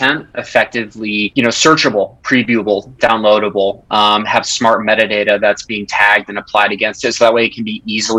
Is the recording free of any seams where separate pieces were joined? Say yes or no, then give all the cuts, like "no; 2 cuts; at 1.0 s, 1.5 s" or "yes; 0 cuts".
no; 1 cut; at 1.3 s